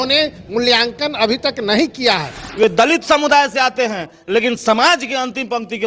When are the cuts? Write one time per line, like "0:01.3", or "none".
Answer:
0:02.6